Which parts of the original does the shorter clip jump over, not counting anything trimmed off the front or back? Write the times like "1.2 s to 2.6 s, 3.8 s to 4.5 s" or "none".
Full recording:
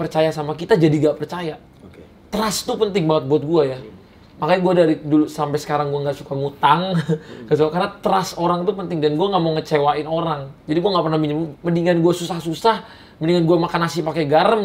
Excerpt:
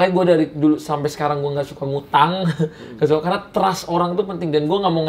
none